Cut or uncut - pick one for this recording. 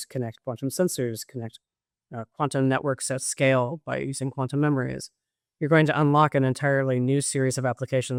uncut